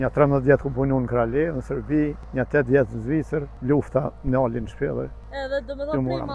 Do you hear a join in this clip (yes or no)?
yes